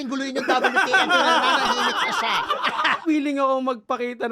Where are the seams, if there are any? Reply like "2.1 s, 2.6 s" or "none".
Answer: 3.0 s